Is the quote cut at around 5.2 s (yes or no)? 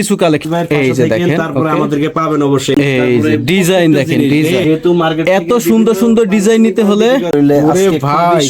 no